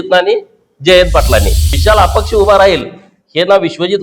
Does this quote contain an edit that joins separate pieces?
yes; 1 cut; at 1.6 s

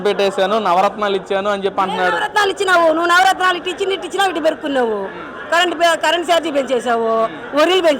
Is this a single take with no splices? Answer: yes; 0 cuts

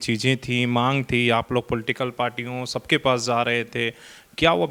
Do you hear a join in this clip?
no; 0 cuts

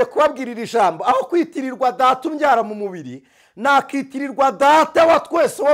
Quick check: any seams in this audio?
no; 0 cuts

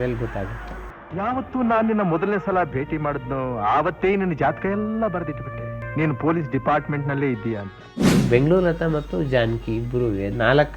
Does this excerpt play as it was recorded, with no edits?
no; 1 cut; at 7.9 s

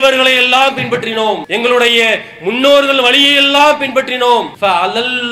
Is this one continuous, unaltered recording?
no; 2 cuts; at 1.5 s, 4.5 s

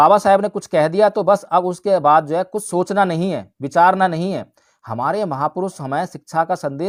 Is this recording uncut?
yes; 0 cuts

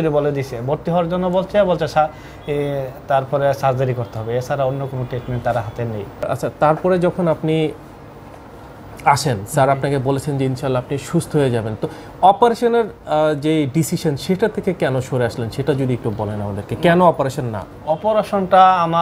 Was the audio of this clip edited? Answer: yes; 1 cut; at 6.3 s

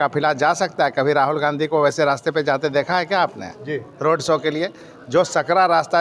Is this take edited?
no; 0 cuts

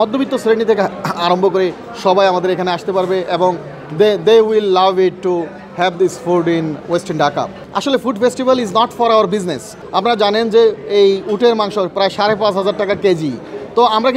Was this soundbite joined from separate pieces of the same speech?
yes; 2 cuts; at 7.6 s, 9.8 s

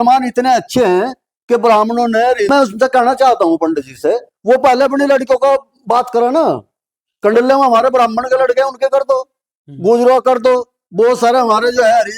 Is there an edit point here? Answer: yes; 1 cut; at 2.5 s

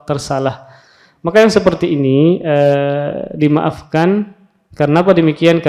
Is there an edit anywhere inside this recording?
no; 0 cuts

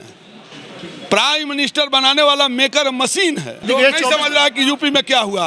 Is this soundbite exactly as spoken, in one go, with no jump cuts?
no; 1 cut; at 3.6 s

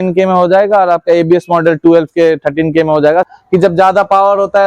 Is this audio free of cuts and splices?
no; 1 cut; at 3.3 s

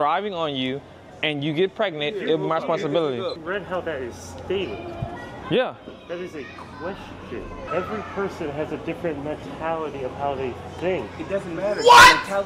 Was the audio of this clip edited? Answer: yes; 2 cuts; at 3.4 s, 7.7 s

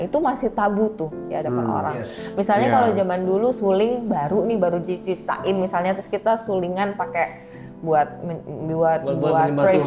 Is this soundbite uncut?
yes; 0 cuts

